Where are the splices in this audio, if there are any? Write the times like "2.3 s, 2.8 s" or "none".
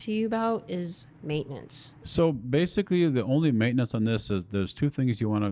2.1 s

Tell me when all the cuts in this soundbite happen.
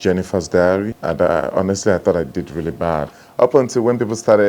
1.0 s, 3.2 s

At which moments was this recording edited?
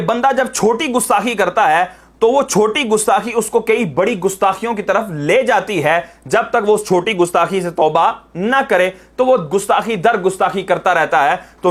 none

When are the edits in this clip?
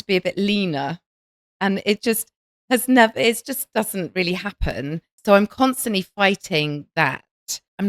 5.1 s

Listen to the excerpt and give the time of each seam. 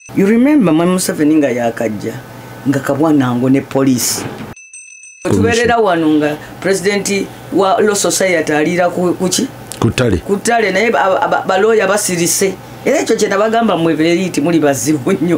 4.9 s

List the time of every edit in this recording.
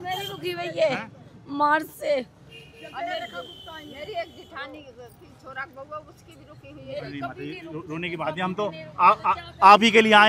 none

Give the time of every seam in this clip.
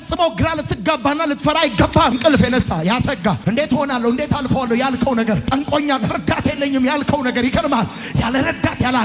2.2 s

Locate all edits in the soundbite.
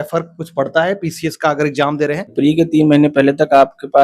2.3 s

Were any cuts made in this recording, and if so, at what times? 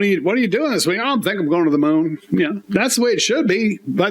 2.4 s

